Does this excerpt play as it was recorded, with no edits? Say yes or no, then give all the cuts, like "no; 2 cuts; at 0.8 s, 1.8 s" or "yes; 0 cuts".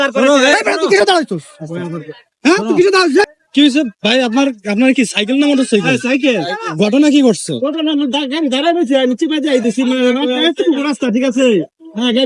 no; 1 cut; at 3.2 s